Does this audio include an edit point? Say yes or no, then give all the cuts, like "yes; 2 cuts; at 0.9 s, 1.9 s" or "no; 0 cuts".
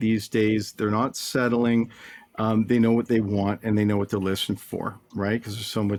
no; 0 cuts